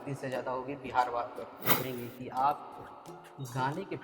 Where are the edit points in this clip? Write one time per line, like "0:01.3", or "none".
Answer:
0:01.8